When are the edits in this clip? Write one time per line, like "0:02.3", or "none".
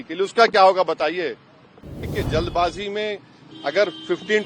0:02.1